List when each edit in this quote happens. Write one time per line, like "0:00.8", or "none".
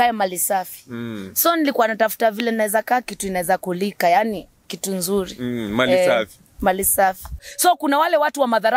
0:07.4